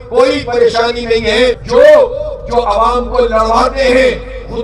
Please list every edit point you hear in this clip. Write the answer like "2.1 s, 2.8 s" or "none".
1.6 s